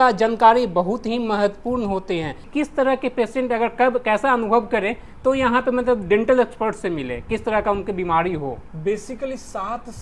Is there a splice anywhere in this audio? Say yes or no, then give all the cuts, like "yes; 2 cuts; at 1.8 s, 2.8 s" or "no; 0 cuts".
yes; 2 cuts; at 2.4 s, 8.7 s